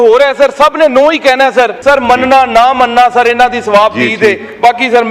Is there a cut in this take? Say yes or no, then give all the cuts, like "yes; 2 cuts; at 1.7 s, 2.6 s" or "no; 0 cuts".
yes; 1 cut; at 1.8 s